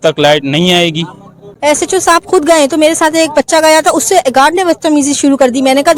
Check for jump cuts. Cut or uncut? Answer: cut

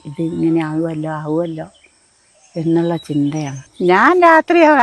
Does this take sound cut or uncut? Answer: uncut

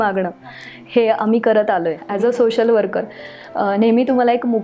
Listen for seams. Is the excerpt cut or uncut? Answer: cut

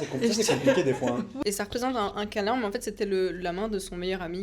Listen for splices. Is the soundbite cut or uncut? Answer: cut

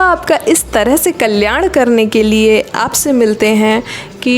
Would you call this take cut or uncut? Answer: uncut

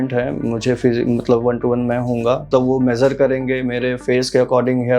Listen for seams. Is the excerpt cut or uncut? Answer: cut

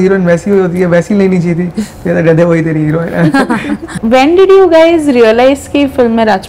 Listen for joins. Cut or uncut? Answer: uncut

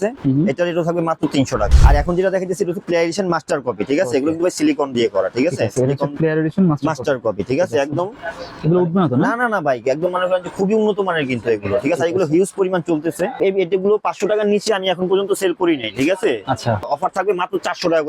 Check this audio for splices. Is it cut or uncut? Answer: cut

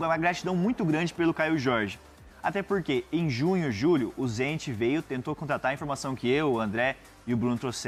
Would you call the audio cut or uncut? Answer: uncut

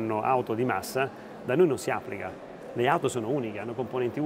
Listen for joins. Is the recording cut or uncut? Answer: uncut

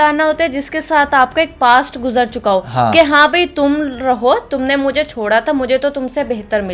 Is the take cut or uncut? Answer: uncut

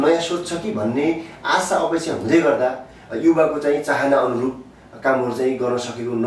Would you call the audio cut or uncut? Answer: uncut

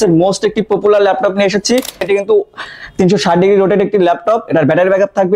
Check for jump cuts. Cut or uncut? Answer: cut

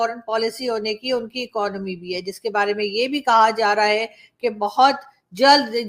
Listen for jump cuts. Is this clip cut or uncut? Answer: uncut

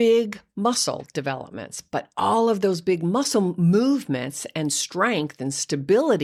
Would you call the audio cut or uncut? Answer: uncut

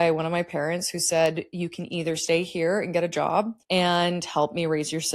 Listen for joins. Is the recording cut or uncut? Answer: cut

